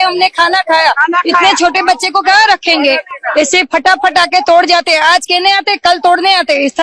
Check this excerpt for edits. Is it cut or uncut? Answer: uncut